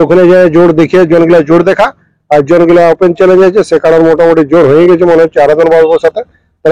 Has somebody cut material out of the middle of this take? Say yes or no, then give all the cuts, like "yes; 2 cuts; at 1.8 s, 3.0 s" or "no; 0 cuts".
no; 0 cuts